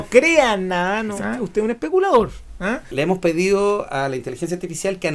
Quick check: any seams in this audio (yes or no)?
yes